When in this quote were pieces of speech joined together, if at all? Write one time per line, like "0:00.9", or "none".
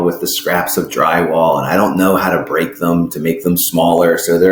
none